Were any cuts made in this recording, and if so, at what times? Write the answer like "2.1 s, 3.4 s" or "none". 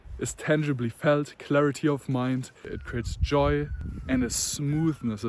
2.7 s